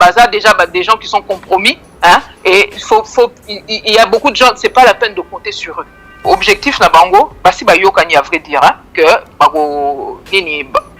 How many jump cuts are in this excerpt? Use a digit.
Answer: 1